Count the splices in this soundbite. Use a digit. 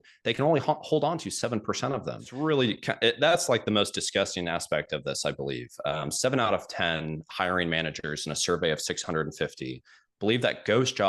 1